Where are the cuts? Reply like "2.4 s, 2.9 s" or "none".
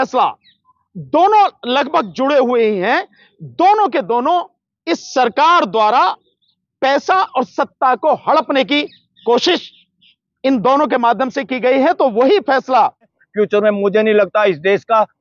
13.2 s